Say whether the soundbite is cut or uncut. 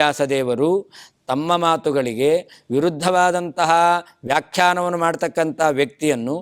uncut